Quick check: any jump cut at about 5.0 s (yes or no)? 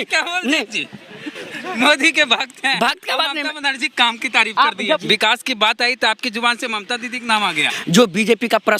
yes